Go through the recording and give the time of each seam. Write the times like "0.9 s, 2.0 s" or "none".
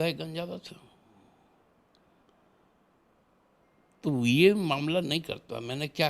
none

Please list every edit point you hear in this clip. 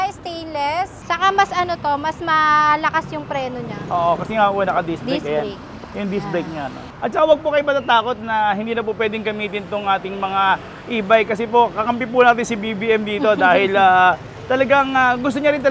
1.0 s, 6.9 s

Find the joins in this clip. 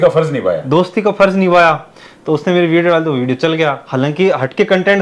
none

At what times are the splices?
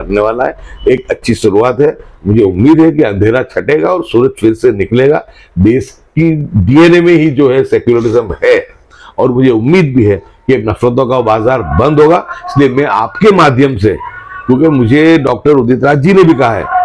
none

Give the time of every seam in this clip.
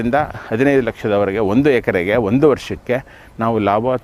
none

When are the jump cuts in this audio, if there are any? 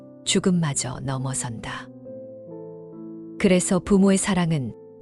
1.8 s, 3.4 s

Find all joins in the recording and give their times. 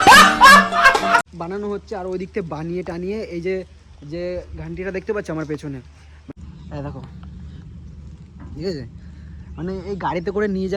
1.2 s, 6.3 s

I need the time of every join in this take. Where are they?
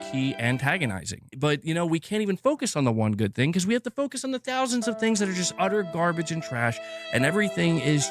1.3 s

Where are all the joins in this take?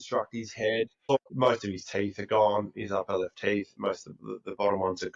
1.1 s

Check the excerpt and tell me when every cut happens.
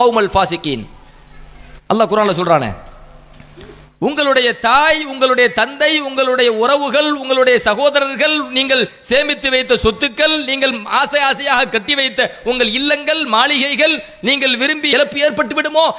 14.9 s

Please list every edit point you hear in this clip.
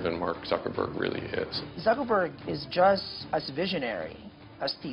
1.6 s, 3.1 s

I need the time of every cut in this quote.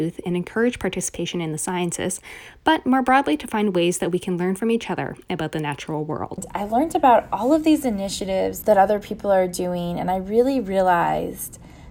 6.5 s, 8.6 s

